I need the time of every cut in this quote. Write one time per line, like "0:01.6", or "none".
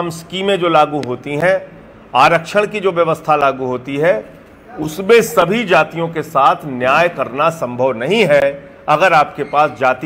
none